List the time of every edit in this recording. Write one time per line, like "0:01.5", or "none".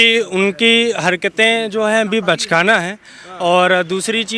none